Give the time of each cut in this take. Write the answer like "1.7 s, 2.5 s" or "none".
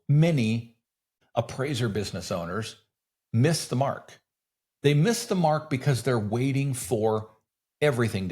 1.1 s